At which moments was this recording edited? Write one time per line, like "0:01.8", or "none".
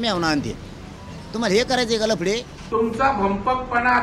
0:02.6